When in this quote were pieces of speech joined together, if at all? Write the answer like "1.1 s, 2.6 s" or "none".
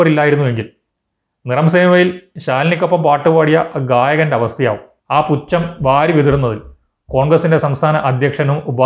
4.9 s